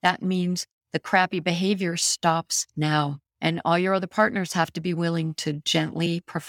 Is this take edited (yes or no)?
no